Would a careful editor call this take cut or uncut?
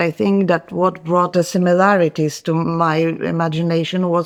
uncut